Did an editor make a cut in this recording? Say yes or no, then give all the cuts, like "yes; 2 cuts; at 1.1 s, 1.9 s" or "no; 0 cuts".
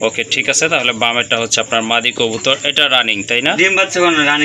no; 0 cuts